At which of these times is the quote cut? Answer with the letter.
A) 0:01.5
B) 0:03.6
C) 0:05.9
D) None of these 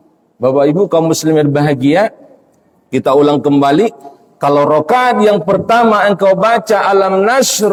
D